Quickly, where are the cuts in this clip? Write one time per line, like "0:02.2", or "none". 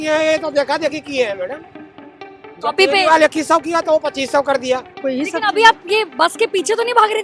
0:04.9